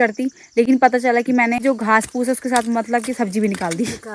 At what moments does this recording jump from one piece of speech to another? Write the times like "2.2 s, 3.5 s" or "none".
1.6 s